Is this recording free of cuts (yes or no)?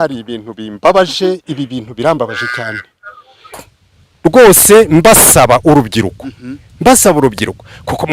no